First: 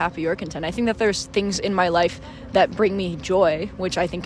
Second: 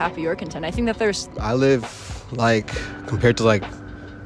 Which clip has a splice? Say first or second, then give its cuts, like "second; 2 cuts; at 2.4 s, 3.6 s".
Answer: second; 1 cut; at 1.2 s